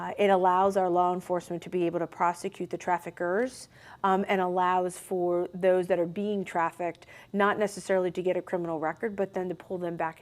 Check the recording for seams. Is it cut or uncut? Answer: uncut